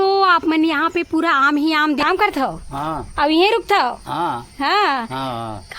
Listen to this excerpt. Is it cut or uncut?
cut